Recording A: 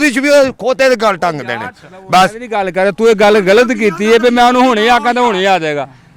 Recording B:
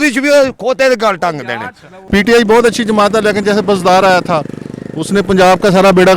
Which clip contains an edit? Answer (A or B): B